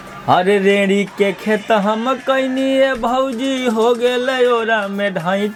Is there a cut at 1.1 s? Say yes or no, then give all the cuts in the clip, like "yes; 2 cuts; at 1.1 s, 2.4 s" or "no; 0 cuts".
no; 0 cuts